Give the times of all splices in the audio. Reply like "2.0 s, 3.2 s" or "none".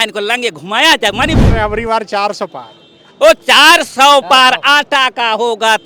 1.4 s